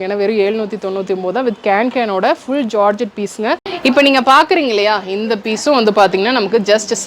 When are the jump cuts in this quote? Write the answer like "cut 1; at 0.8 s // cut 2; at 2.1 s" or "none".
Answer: cut 1; at 3.7 s